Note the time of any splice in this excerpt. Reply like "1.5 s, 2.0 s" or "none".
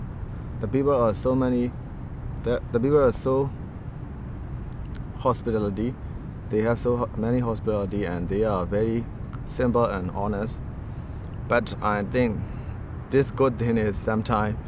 5.3 s